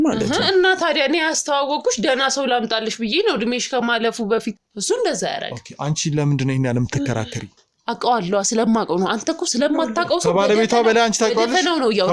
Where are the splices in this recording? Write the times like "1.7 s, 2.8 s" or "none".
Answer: 4.7 s